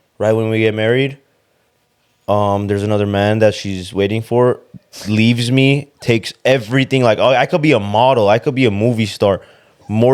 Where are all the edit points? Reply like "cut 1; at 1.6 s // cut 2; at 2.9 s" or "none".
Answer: none